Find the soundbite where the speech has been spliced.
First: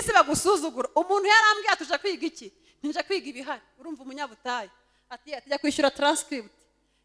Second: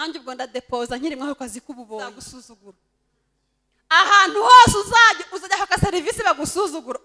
second; 1 cut; at 2.2 s

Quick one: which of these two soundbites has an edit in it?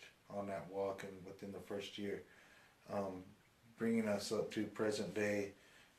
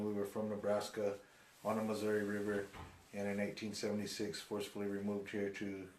second; 1 cut; at 2.0 s

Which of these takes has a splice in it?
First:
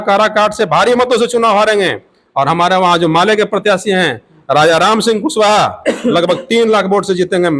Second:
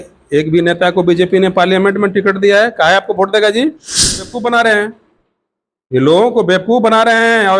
second; 1 cut; at 4.3 s

